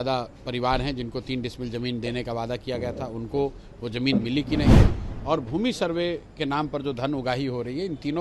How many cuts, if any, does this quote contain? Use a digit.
0